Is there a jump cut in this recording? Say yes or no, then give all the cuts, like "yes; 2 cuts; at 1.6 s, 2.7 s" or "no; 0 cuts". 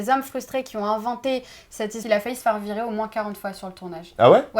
yes; 1 cut; at 2.0 s